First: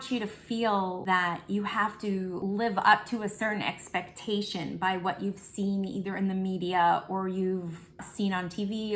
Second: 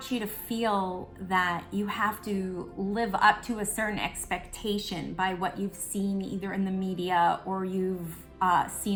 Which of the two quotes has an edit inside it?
first; 3 cuts; at 1.0 s, 2.4 s, 8.0 s

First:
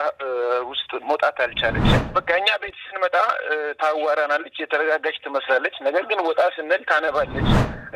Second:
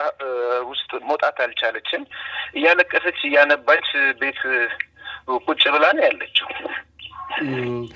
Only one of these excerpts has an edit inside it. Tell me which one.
first; 1 cut; at 2.0 s

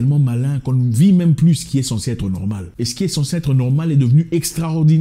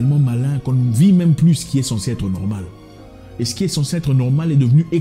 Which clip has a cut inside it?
first; 1 cut; at 2.7 s

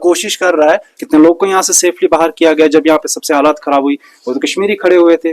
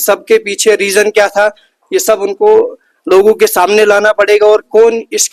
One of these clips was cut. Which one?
first; 1 cut; at 0.9 s

